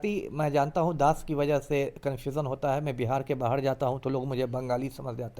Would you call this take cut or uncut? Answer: uncut